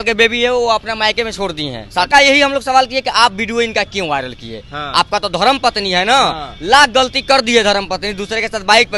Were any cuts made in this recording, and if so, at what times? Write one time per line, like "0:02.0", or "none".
0:02.1